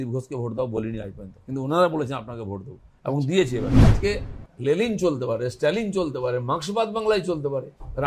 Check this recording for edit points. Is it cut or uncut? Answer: cut